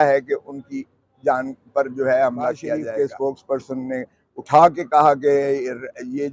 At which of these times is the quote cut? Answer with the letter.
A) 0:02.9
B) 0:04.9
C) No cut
A